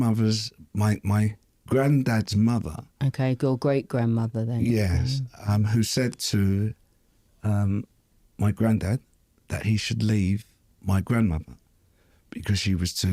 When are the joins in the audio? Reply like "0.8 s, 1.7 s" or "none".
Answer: none

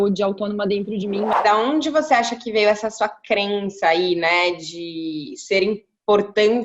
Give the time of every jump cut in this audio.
1.3 s

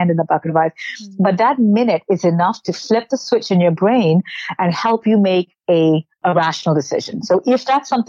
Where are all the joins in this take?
6.2 s

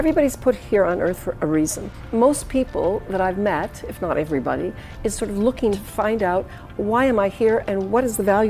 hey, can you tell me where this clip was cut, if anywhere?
1.9 s, 5.8 s

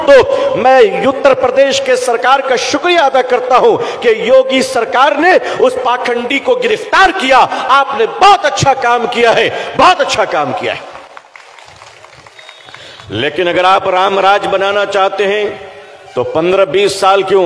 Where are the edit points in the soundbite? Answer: 11.3 s

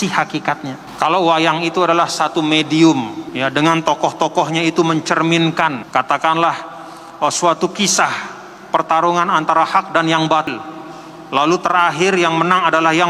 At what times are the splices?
0.8 s, 3.2 s, 5.8 s, 10.5 s

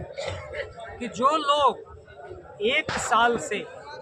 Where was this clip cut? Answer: none

